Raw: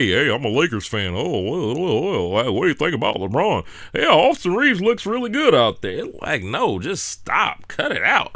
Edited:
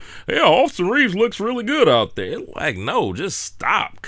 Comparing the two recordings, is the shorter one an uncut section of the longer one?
yes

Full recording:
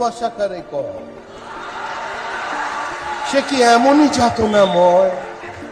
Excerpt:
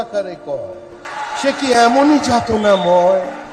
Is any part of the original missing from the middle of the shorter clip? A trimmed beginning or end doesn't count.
yes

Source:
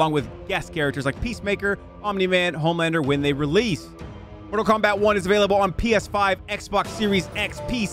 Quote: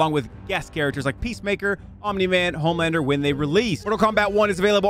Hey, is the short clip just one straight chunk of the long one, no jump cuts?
no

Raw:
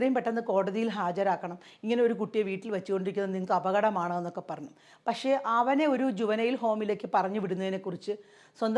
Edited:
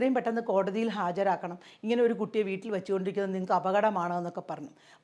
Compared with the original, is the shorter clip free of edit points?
yes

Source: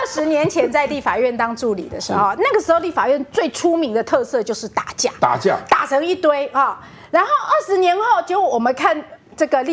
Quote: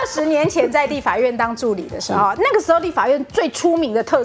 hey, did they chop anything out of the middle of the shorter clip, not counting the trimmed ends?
no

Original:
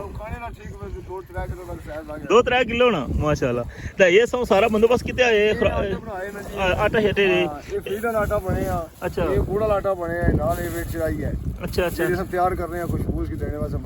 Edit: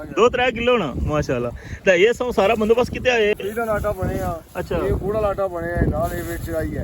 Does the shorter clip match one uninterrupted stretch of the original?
no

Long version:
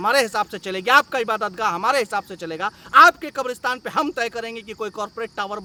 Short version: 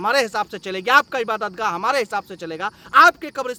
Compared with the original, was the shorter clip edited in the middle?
no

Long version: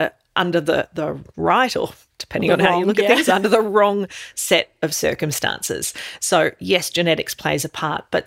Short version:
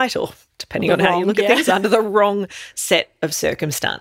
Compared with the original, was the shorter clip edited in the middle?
no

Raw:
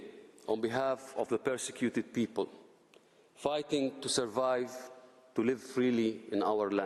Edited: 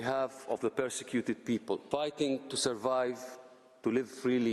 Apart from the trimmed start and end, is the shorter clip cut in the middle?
yes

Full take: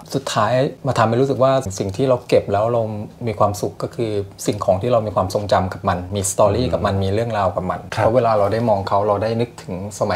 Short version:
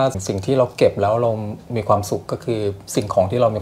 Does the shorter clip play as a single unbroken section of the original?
yes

